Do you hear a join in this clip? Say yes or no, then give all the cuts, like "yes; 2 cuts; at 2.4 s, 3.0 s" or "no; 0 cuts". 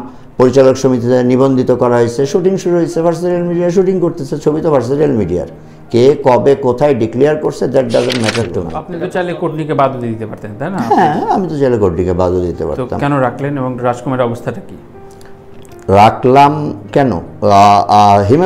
yes; 1 cut; at 8.8 s